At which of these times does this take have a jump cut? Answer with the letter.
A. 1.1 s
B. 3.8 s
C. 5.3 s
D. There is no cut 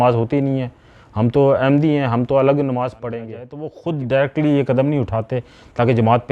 B